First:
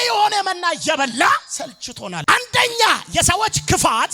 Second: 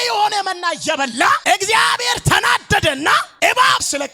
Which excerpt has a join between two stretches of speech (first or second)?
second